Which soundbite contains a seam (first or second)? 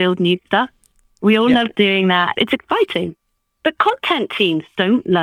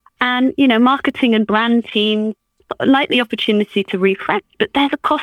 first